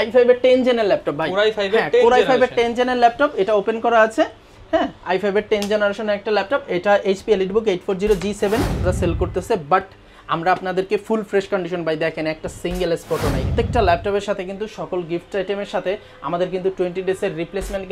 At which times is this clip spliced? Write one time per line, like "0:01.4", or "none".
0:08.8
0:13.5